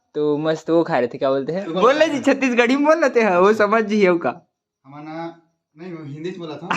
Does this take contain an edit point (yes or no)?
yes